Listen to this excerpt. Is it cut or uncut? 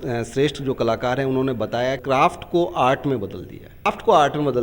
cut